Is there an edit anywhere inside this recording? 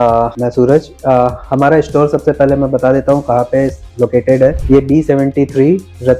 no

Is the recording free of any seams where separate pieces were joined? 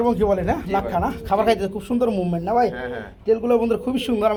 yes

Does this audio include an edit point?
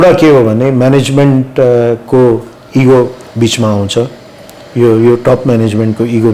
no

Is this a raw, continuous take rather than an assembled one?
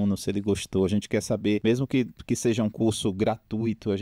no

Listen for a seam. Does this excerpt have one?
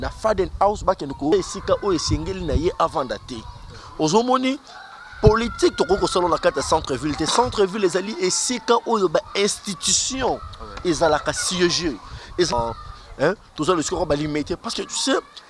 yes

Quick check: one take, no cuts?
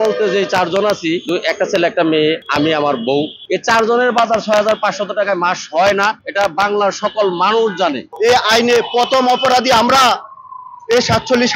no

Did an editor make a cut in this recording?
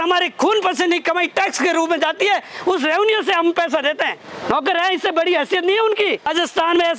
yes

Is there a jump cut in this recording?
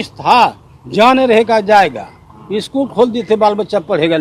no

